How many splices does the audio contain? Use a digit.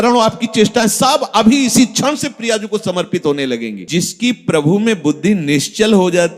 1